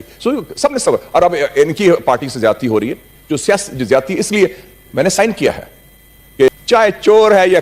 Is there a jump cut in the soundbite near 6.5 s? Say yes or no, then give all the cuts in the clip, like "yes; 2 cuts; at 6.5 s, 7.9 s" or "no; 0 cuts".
yes; 1 cut; at 6.5 s